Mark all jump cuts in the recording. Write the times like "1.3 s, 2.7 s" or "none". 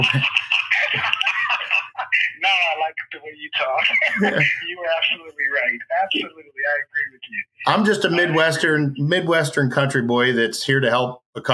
none